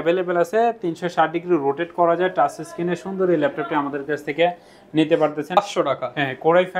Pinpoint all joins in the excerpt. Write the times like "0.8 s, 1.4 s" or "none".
5.6 s